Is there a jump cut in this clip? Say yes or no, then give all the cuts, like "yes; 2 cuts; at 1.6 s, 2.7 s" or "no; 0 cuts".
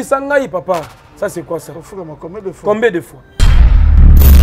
yes; 1 cut; at 3.5 s